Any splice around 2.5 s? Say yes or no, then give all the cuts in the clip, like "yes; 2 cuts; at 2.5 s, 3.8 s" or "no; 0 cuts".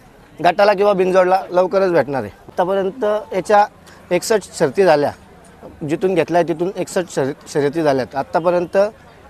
yes; 1 cut; at 2.5 s